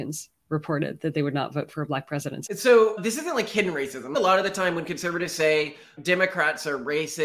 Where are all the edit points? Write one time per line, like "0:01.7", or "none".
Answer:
0:02.5
0:04.1
0:05.9